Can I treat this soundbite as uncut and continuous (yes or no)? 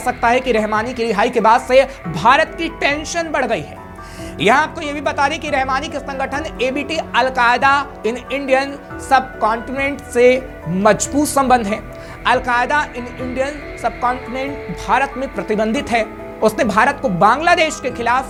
yes